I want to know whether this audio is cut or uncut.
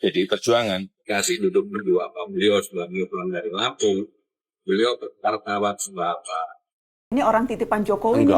cut